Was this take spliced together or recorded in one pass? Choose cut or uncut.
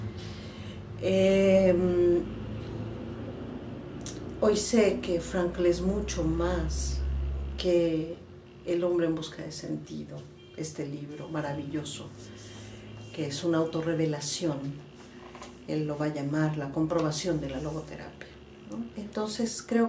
cut